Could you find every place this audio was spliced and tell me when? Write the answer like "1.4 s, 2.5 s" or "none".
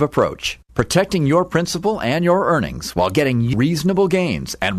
3.5 s